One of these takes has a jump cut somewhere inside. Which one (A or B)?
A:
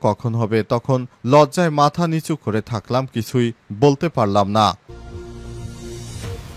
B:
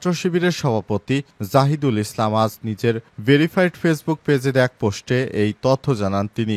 A